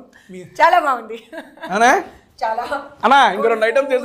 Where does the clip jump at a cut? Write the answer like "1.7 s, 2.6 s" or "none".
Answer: none